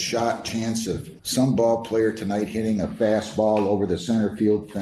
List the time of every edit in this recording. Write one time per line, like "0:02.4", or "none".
0:01.1